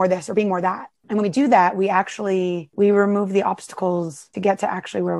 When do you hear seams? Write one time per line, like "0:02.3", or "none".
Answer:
0:00.9
0:02.7
0:04.2